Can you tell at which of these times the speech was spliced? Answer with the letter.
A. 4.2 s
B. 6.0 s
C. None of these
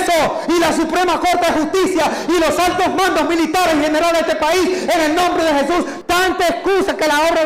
B